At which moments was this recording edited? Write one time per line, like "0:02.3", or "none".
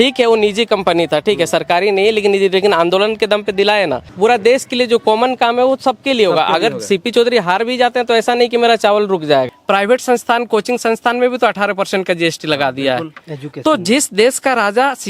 0:04.1
0:09.5